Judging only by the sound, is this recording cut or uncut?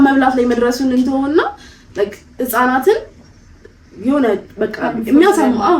uncut